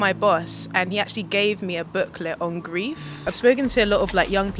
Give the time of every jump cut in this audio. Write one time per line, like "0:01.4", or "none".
0:03.3